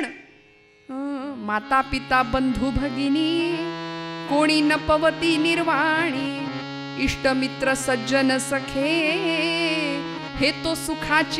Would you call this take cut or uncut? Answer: uncut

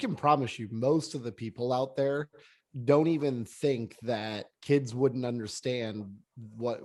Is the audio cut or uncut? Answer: uncut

